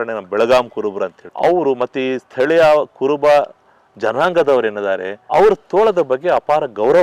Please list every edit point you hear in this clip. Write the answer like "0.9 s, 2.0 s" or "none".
1.2 s, 5.1 s